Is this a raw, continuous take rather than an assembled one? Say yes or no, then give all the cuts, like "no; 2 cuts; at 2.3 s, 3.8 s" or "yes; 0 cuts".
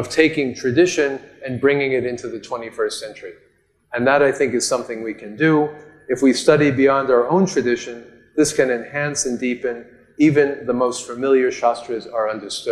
yes; 0 cuts